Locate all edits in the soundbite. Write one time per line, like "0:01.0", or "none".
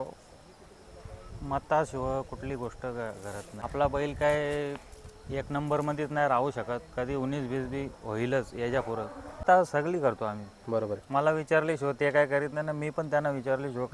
0:03.5
0:09.4